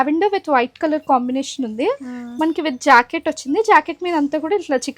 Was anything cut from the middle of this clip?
no; 0 cuts

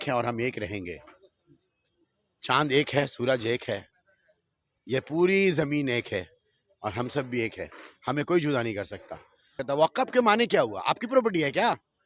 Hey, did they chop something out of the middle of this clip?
yes; 1 cut; at 9.6 s

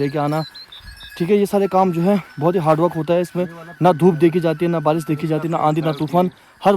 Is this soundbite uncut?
yes; 0 cuts

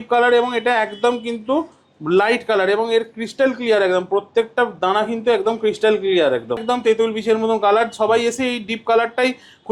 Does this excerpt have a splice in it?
yes; 1 cut; at 6.6 s

